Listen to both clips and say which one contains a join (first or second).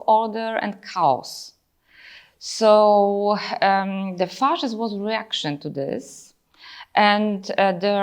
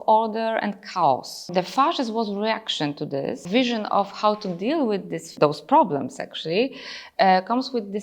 second